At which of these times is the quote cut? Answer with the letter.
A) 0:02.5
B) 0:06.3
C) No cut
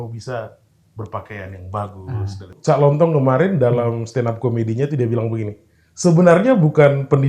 A